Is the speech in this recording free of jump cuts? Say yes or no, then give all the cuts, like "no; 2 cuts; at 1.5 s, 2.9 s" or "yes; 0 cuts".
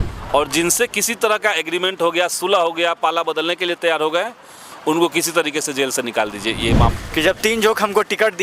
no; 1 cut; at 6.9 s